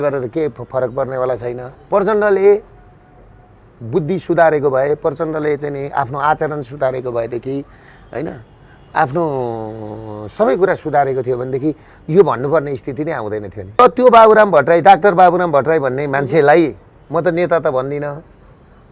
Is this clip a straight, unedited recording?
no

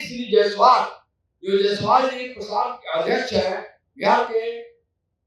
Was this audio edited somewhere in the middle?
no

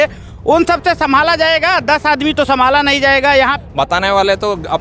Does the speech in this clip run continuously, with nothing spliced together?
no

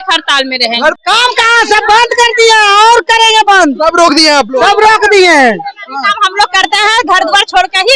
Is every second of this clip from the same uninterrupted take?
no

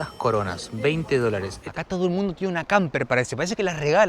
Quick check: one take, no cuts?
no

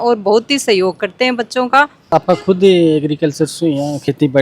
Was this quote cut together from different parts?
yes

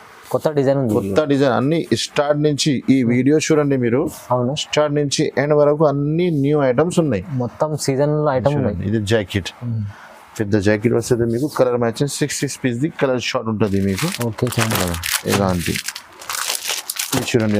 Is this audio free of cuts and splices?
yes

